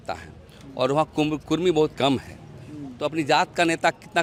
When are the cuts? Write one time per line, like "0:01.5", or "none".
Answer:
none